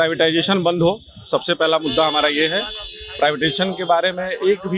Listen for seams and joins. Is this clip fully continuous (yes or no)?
yes